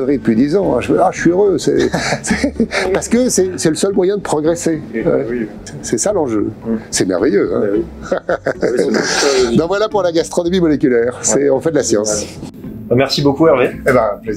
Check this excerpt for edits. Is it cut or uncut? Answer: uncut